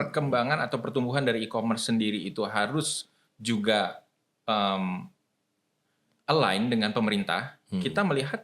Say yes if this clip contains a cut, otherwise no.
no